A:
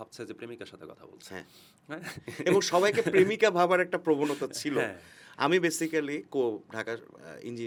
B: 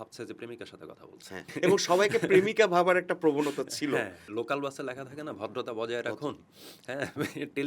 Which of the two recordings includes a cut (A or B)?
B